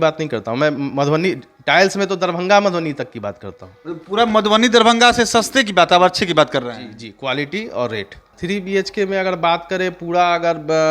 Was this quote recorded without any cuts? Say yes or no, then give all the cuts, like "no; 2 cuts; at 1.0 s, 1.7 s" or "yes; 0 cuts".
no; 1 cut; at 8.2 s